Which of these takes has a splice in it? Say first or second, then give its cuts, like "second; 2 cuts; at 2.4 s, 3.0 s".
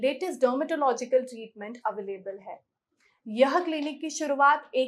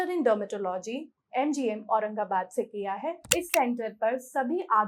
second; 1 cut; at 3.2 s